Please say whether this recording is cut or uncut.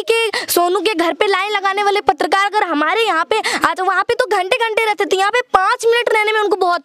uncut